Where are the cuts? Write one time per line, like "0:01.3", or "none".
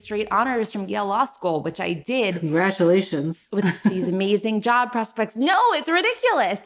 none

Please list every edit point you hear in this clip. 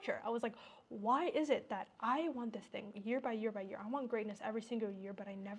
none

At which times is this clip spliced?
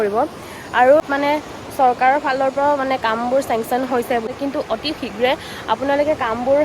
0:01.0
0:04.3

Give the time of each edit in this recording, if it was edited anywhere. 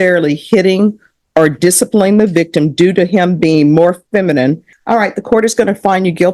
0:04.7

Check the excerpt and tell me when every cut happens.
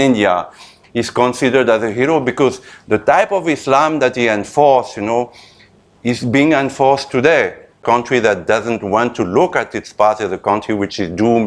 0:07.8

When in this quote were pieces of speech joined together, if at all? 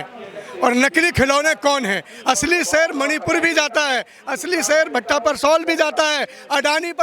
none

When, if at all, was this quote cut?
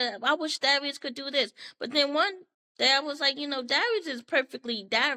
none

